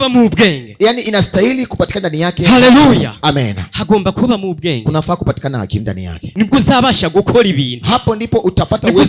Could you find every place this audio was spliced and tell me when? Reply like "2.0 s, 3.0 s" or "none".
6.2 s